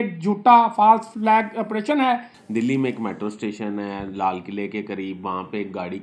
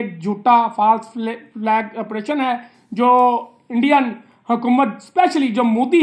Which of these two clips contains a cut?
first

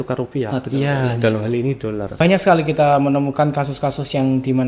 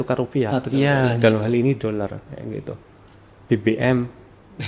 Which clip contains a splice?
first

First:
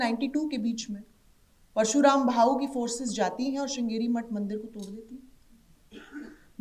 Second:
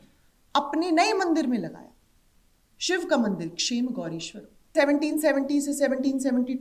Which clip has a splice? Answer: second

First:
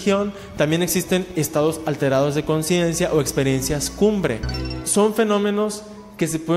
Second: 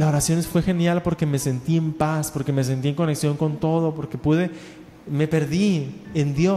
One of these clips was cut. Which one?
first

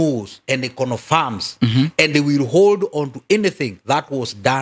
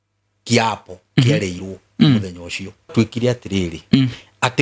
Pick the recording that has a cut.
second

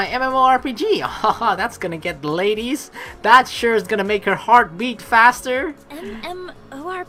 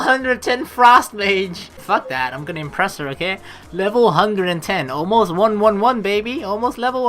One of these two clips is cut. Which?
second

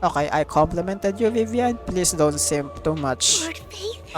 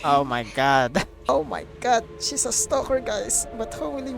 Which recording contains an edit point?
second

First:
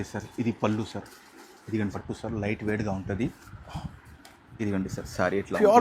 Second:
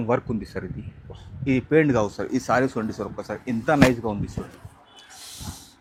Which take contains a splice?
first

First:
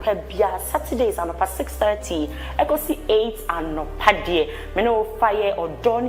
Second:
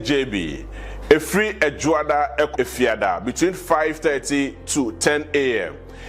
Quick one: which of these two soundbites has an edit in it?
second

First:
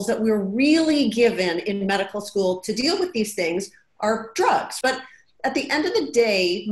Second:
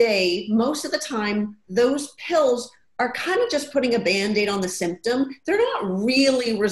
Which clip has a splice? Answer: first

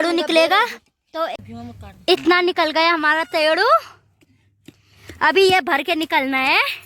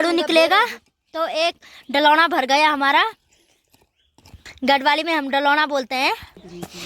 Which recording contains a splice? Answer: first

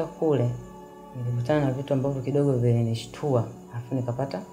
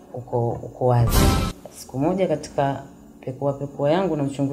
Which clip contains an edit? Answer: second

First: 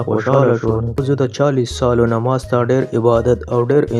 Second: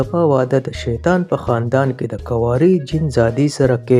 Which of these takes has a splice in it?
first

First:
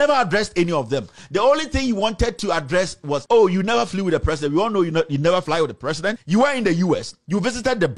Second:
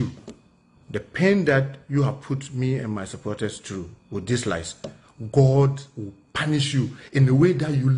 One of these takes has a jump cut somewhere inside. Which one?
first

